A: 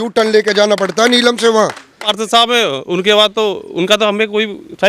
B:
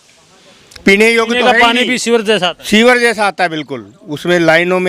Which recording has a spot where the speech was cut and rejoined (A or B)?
A